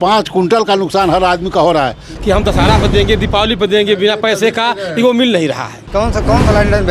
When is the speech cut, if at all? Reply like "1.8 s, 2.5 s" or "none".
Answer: 2.1 s, 5.8 s